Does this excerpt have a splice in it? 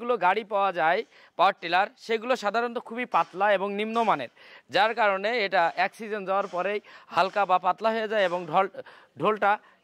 no; 0 cuts

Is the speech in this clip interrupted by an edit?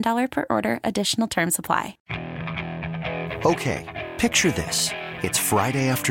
yes; 1 cut; at 2.0 s

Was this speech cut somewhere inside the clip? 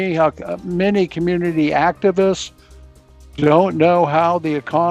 no; 0 cuts

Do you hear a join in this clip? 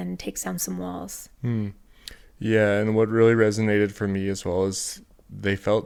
no; 0 cuts

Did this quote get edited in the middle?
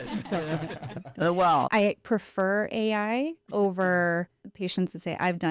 yes; 2 cuts; at 1.7 s, 4.4 s

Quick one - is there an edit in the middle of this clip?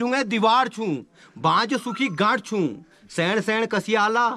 no; 0 cuts

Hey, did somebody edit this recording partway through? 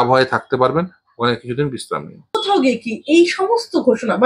yes; 1 cut; at 2.2 s

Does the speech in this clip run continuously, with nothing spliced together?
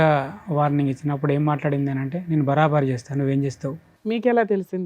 no; 1 cut; at 3.9 s

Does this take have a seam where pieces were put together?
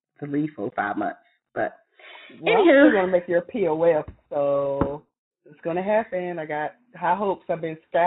no; 0 cuts

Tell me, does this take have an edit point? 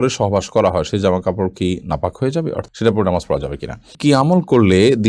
yes; 2 cuts; at 2.7 s, 3.9 s

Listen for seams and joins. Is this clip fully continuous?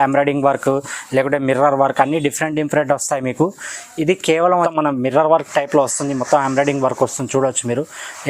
no; 1 cut; at 4.7 s

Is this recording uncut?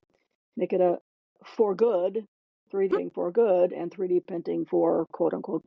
no; 1 cut; at 2.9 s

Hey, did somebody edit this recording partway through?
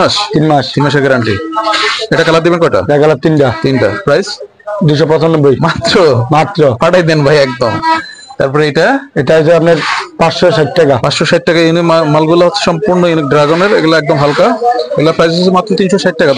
no; 0 cuts

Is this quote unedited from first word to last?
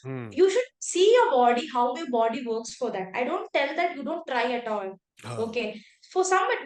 yes; 0 cuts

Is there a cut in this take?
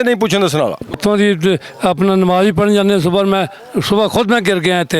yes; 1 cut; at 1.0 s

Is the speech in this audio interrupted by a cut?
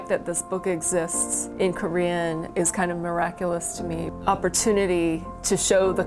yes; 3 cuts; at 1.2 s, 2.5 s, 4.1 s

